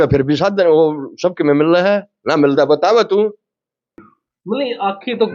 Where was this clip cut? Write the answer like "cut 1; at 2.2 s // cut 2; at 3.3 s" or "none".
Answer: cut 1; at 4.0 s